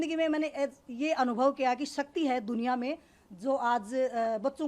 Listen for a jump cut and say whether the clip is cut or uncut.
uncut